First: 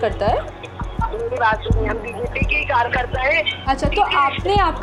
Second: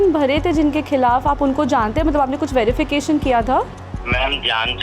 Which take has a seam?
second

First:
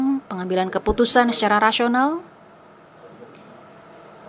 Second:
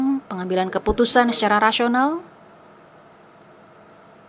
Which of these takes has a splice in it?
first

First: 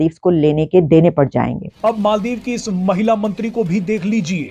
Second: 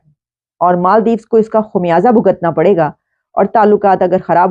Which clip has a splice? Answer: first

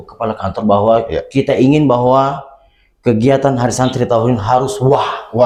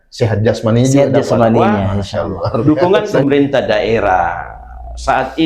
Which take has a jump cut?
second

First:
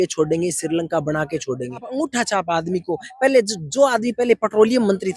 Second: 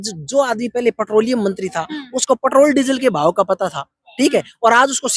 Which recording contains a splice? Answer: first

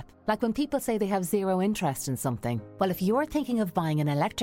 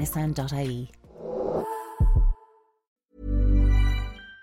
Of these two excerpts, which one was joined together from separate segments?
second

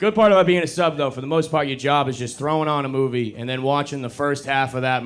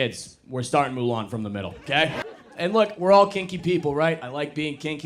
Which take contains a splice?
second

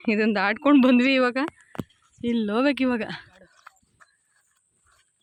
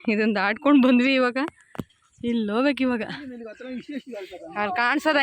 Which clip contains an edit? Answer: second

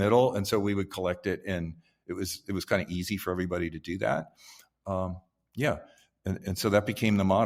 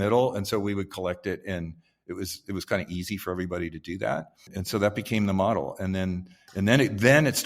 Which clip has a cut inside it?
second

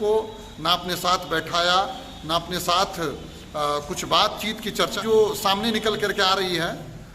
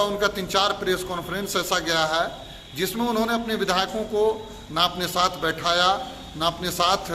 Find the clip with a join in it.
first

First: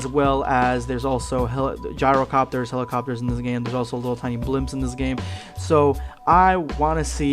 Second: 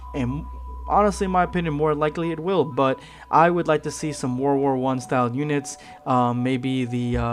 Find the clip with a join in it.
first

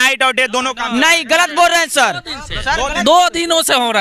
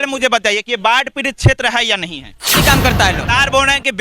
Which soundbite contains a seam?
second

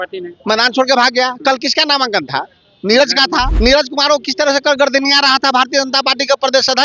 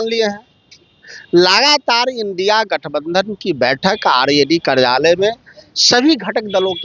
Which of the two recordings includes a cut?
first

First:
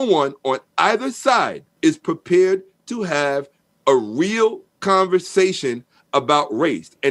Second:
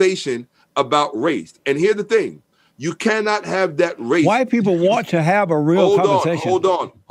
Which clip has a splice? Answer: first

